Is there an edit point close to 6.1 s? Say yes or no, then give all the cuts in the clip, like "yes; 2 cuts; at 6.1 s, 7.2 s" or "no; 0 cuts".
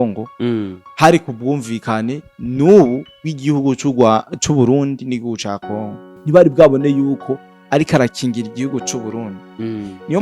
yes; 1 cut; at 6.1 s